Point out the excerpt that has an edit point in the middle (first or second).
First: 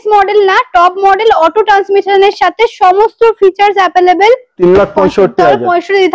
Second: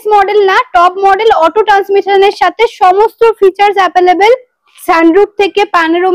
first